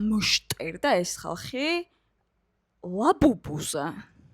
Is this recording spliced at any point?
no; 0 cuts

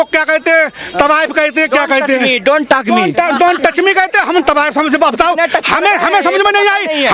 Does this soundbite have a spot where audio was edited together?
no; 0 cuts

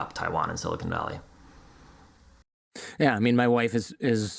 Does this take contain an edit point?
no; 0 cuts

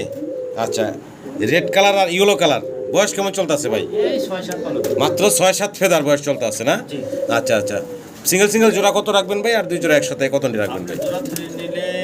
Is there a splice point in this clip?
no; 0 cuts

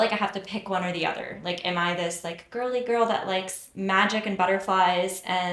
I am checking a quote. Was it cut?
no; 0 cuts

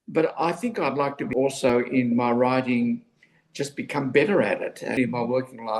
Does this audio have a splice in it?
yes; 2 cuts; at 1.7 s, 4.9 s

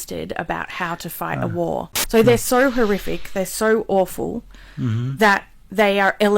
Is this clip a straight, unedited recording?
no; 1 cut; at 2.0 s

